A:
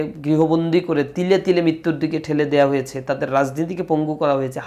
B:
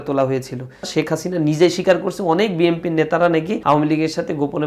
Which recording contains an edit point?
B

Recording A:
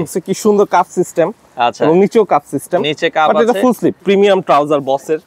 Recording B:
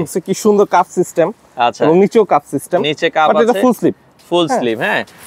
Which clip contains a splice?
A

